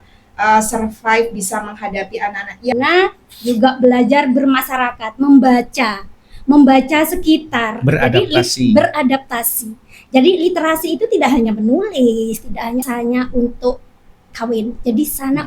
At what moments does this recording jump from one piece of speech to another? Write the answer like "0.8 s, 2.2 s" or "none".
2.7 s, 12.9 s